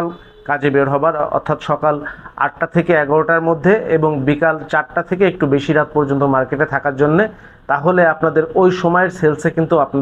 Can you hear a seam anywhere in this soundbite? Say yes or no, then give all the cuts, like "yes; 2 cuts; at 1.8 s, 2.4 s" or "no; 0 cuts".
no; 0 cuts